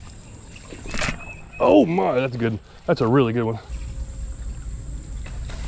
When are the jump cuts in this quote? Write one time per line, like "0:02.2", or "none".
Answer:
0:03.7

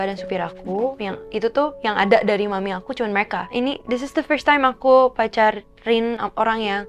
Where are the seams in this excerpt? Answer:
0:03.4

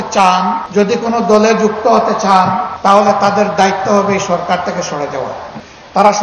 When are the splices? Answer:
none

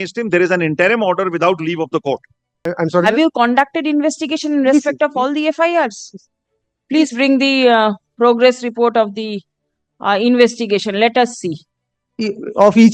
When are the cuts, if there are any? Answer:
0:02.6

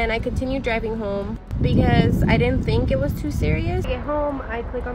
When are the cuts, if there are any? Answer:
0:03.9

